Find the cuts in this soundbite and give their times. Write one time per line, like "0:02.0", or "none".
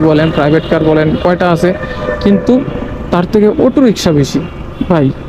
none